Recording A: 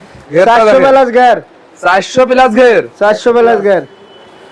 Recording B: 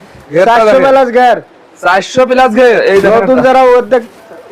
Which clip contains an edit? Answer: B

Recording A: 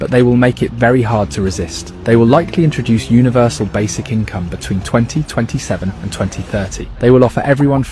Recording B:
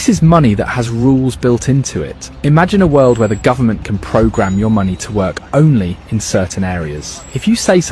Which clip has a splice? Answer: B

